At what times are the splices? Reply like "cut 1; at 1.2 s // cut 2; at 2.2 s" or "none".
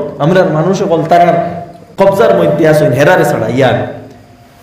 cut 1; at 1.8 s